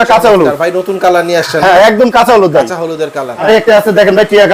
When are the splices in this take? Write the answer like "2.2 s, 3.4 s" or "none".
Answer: 3.4 s